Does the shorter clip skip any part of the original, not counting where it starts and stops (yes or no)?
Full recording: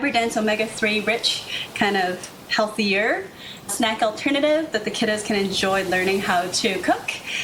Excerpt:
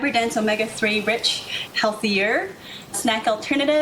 yes